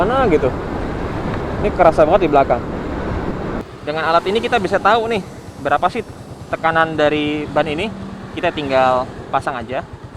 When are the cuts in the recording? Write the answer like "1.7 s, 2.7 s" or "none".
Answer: 3.7 s